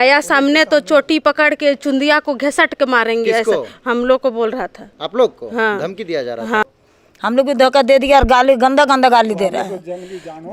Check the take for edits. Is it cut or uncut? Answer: cut